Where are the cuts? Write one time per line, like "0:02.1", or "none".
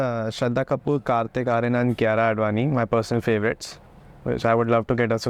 none

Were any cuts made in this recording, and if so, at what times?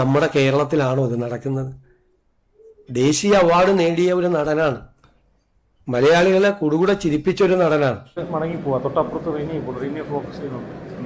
0:08.2

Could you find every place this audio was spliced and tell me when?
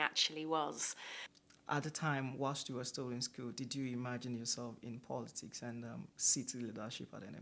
0:01.2

